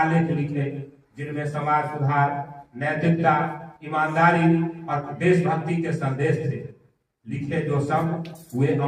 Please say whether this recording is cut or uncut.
uncut